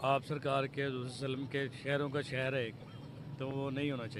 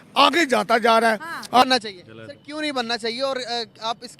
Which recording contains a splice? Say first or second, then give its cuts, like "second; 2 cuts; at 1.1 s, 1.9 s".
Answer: second; 1 cut; at 1.6 s